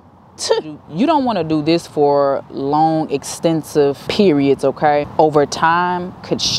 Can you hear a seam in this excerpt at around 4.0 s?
yes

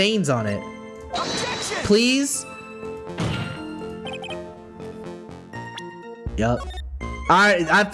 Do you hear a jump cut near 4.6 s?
no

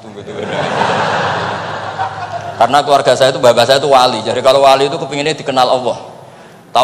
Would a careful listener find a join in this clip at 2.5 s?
yes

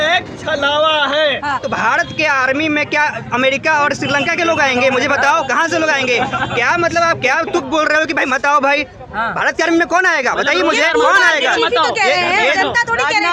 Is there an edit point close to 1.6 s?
yes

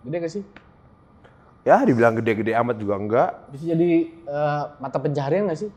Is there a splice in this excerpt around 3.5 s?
no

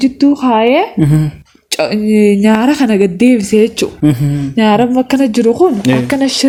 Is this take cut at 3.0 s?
no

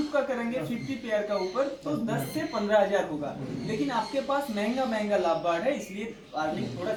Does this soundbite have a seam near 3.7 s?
no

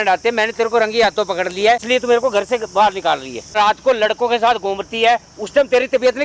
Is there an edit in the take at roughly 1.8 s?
yes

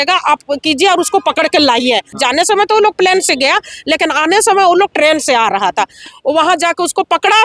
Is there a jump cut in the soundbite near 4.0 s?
no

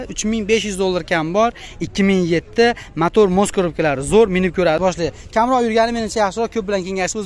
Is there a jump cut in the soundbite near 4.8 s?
yes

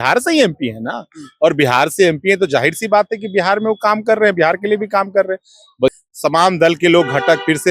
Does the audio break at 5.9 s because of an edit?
yes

